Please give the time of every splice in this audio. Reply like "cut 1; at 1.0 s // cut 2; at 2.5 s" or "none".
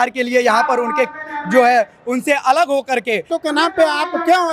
cut 1; at 3.3 s